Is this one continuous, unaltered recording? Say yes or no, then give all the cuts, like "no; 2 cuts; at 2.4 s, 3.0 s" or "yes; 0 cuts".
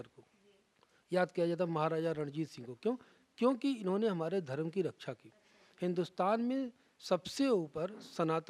yes; 0 cuts